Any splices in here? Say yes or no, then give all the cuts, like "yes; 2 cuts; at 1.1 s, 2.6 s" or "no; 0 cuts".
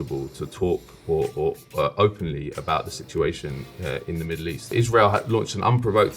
yes; 1 cut; at 4.7 s